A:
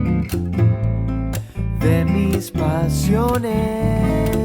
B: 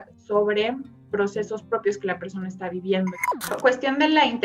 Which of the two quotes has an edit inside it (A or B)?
B